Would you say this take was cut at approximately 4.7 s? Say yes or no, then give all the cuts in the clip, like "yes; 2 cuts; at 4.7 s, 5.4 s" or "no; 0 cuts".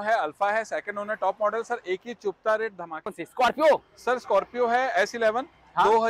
no; 1 cut; at 3.1 s